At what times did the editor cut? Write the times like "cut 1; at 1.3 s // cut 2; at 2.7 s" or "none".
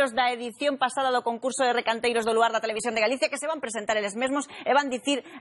cut 1; at 4.2 s